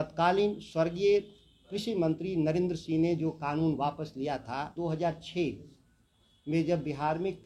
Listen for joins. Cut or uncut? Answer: cut